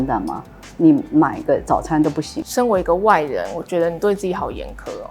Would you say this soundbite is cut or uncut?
cut